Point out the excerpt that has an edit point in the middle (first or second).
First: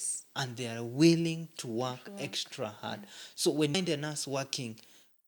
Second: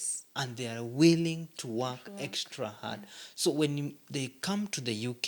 first